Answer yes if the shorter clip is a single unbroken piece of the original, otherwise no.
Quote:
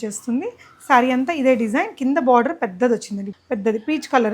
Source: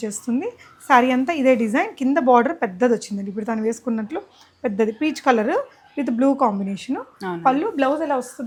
no